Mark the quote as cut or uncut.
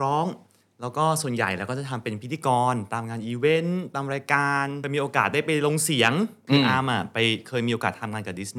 cut